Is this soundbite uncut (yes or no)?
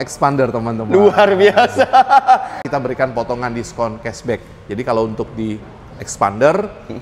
no